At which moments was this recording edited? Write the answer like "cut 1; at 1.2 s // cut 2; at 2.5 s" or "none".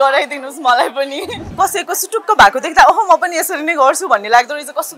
cut 1; at 1.5 s

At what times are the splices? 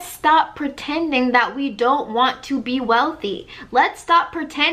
none

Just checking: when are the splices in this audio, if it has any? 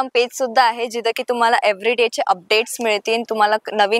none

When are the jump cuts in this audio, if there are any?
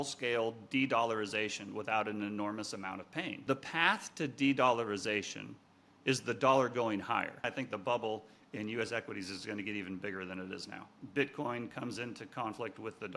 cut 1; at 3.4 s // cut 2; at 7.5 s // cut 3; at 11.0 s

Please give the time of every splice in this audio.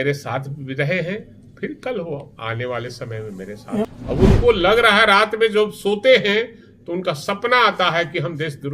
cut 1; at 3.9 s

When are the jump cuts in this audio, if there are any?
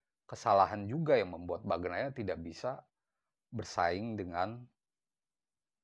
none

